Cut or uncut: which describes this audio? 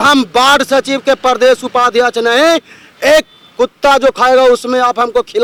uncut